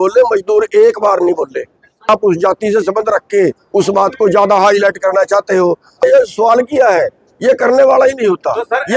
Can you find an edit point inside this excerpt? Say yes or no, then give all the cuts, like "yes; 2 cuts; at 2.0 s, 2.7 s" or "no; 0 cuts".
yes; 2 cuts; at 2.1 s, 6.0 s